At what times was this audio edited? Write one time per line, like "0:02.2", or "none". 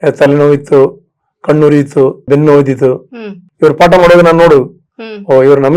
0:02.2
0:03.4

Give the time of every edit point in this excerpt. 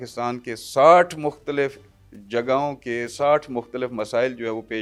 none

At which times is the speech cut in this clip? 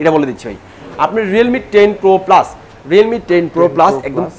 none

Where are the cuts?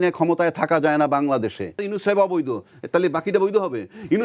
0:01.8

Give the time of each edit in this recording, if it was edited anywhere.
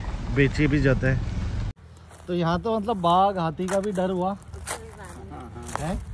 0:01.6

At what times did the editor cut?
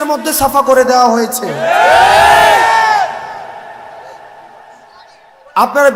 none

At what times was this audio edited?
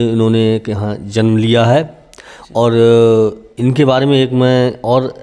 none

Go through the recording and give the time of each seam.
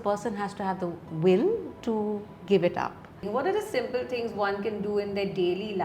0:03.2

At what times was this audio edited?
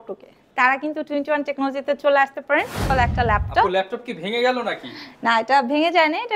0:02.9

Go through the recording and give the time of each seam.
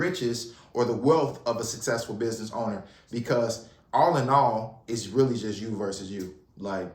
0:02.9

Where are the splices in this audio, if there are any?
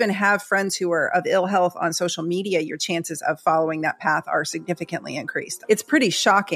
0:05.5

